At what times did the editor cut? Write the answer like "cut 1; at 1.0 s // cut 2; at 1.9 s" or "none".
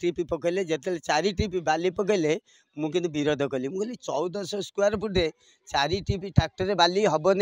none